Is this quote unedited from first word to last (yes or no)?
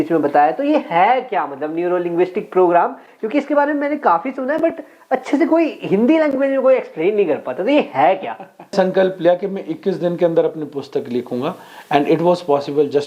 no